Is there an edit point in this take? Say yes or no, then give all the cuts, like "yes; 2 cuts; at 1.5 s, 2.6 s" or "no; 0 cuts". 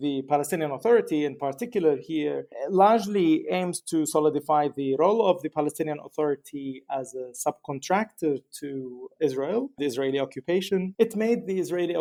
no; 0 cuts